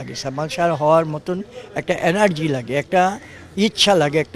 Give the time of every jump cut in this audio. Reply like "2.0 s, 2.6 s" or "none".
none